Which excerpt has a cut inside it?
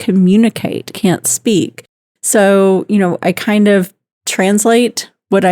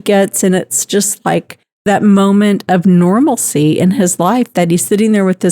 second; 1 cut; at 1.8 s

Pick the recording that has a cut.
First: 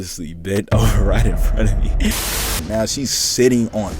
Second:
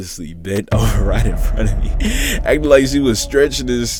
first; 1 cut; at 2.5 s

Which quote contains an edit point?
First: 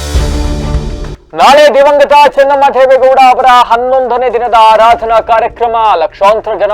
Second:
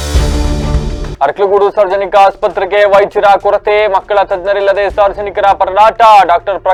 first; 1 cut; at 1.1 s

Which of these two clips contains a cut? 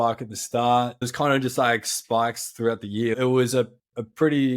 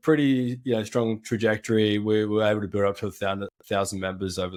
first; 2 cuts; at 1.1 s, 3.1 s

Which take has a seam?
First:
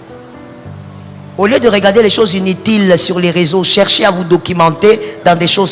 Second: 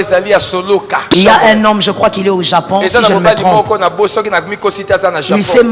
second; 1 cut; at 1.1 s

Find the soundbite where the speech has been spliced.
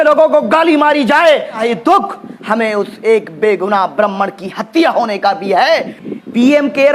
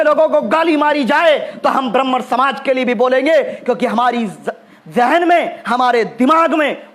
first; 2 cuts; at 1.6 s, 5.9 s

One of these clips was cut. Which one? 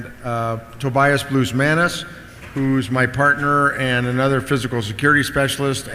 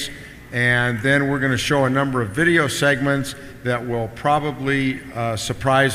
second; 1 cut; at 3.3 s

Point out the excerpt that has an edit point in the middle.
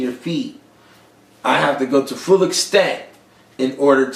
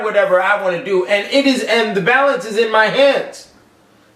first; 1 cut; at 1.2 s

